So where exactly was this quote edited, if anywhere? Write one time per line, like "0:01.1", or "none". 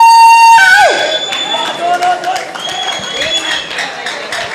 none